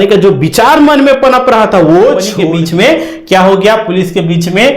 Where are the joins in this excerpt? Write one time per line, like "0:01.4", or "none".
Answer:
0:02.3